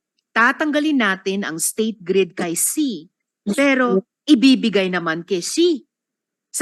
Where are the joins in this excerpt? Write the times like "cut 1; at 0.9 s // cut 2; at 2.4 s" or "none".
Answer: none